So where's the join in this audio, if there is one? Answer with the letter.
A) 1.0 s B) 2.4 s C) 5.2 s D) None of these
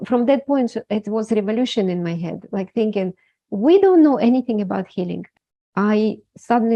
C